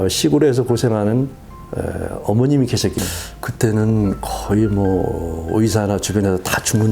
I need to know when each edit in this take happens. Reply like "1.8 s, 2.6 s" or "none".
3.0 s